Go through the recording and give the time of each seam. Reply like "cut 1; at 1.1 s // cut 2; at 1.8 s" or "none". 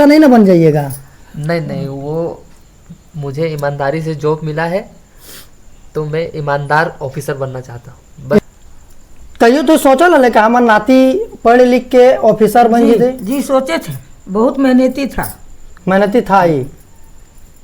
cut 1; at 8.4 s